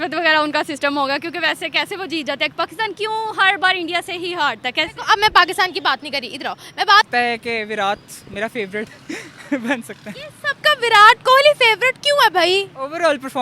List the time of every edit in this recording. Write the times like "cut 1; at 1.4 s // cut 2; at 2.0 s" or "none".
cut 1; at 7.1 s